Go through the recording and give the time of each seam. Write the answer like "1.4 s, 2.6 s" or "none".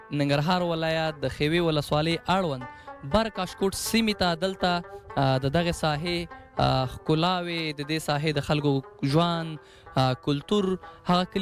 none